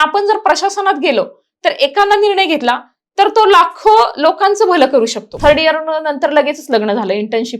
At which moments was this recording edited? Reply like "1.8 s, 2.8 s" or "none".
5.3 s